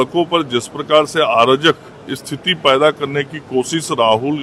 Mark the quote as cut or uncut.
uncut